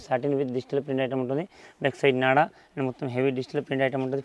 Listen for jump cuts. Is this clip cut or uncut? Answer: uncut